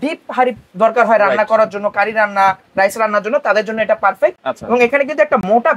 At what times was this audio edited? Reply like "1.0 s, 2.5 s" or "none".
none